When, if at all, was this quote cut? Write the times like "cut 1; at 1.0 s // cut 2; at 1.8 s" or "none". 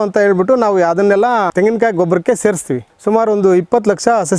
cut 1; at 1.5 s // cut 2; at 2.9 s